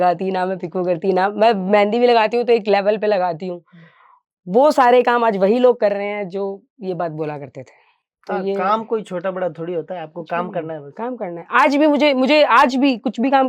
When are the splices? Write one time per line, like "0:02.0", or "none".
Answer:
none